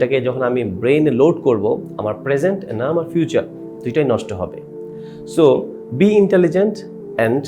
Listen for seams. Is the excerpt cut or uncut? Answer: uncut